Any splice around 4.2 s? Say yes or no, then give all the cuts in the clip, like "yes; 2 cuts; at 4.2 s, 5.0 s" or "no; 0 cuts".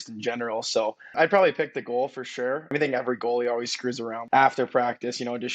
yes; 3 cuts; at 1.1 s, 2.7 s, 4.2 s